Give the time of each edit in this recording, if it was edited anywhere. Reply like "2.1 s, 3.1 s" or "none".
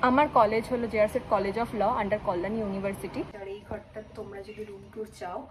3.4 s